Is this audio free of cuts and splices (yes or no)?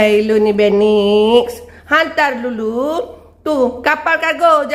yes